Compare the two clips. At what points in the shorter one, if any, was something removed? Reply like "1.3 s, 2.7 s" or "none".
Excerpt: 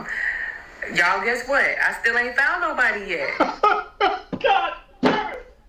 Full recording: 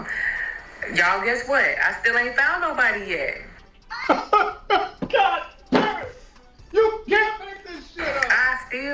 3.3 s